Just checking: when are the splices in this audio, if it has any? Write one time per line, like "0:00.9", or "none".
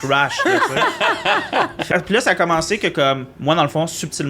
0:01.9